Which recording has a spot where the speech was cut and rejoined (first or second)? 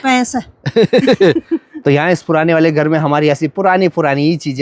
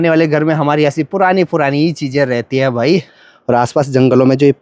second